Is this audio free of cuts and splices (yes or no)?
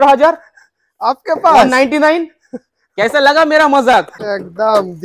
no